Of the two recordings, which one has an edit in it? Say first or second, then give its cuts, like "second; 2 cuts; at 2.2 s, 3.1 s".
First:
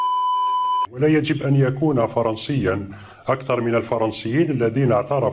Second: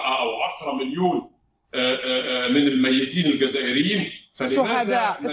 first; 1 cut; at 0.9 s